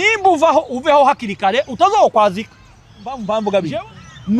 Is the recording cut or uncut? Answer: cut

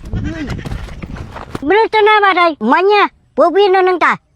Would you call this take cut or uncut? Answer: cut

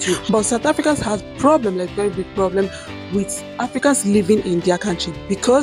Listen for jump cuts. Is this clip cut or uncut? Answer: uncut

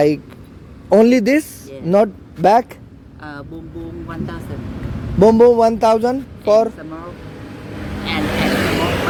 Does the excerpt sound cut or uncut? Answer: uncut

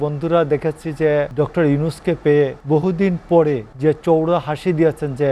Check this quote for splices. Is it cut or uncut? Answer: cut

